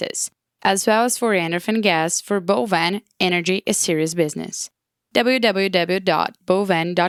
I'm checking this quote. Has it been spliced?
no; 0 cuts

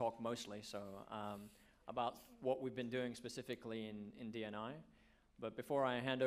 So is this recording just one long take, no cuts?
yes; 0 cuts

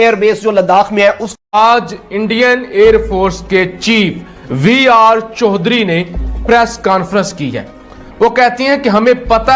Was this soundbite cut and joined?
yes; 1 cut; at 1.5 s

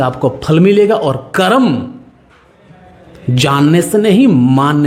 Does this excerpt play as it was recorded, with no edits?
yes; 0 cuts

